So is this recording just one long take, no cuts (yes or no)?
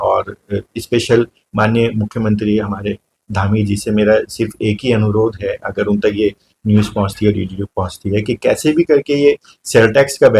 yes